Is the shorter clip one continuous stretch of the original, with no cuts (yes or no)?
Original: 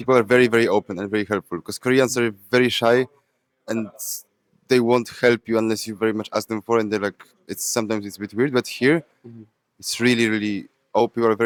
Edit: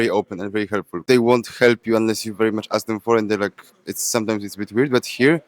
no